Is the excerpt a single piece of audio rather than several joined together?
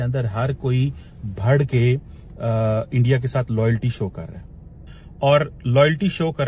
yes; 0 cuts

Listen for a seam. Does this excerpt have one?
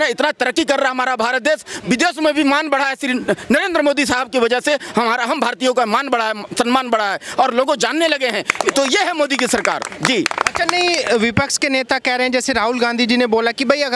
no; 0 cuts

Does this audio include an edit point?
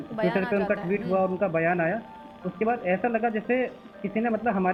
no; 0 cuts

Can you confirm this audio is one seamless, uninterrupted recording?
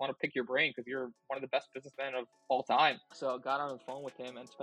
no; 1 cut; at 3.1 s

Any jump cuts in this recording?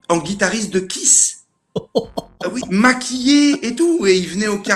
no; 0 cuts

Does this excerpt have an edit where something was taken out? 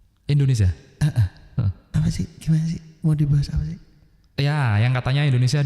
no; 0 cuts

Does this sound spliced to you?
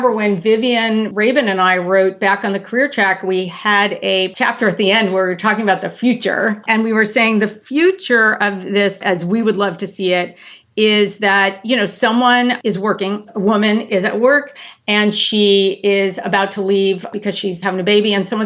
yes; 2 cuts; at 1.1 s, 6.6 s

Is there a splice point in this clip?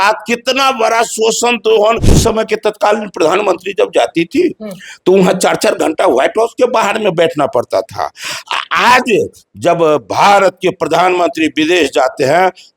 yes; 1 cut; at 2.1 s

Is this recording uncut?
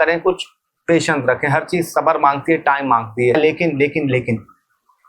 no; 1 cut; at 3.4 s

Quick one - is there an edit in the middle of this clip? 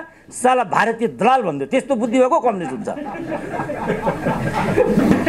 no; 0 cuts

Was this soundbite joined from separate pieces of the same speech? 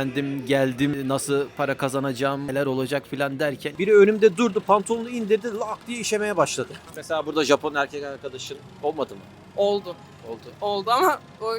yes; 3 cuts; at 0.9 s, 3.7 s, 6.8 s

